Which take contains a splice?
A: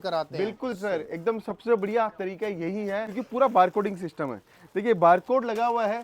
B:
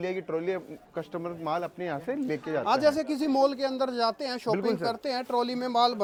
A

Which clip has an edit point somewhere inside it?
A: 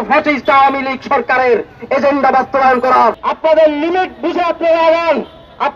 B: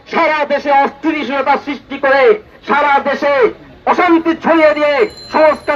A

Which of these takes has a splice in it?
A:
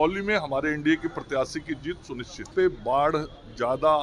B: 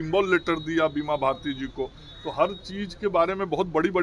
A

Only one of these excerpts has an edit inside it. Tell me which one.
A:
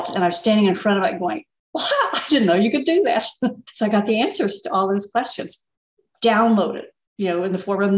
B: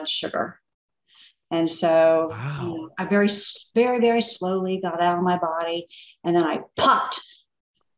A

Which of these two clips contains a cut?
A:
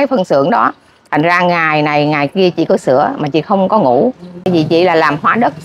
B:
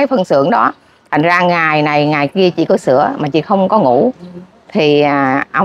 A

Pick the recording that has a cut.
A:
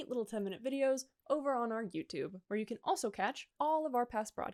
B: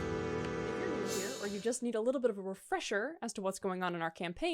B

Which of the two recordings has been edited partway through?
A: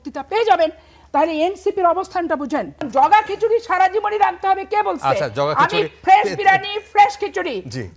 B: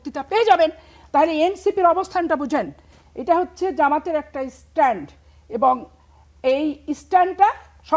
A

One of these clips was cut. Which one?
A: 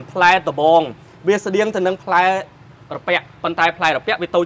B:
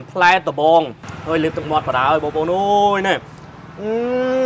B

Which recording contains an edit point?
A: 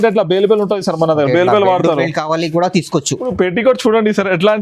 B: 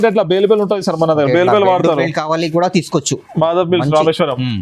A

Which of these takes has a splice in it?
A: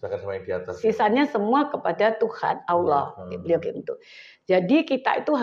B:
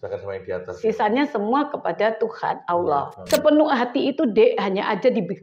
B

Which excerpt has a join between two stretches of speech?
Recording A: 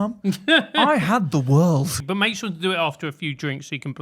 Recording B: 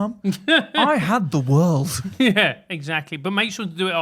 A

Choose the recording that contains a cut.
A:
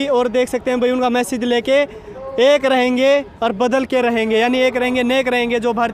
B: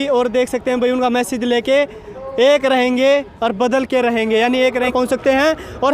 B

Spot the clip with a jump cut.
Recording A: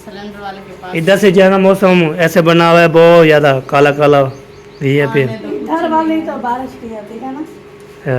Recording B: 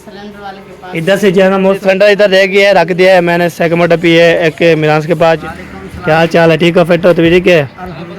B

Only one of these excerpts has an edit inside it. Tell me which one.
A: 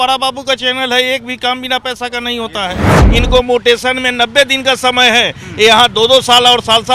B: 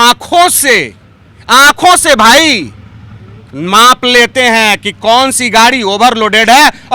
A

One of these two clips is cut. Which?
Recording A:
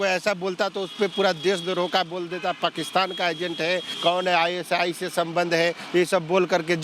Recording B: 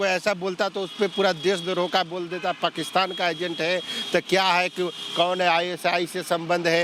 A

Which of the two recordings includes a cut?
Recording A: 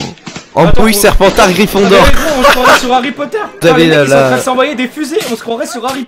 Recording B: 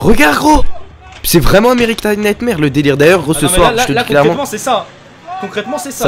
A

